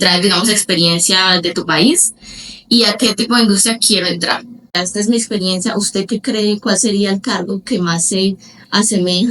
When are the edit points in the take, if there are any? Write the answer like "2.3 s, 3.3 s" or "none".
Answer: 4.8 s